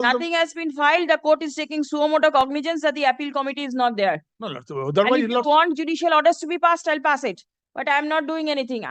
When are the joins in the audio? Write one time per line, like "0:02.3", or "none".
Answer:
none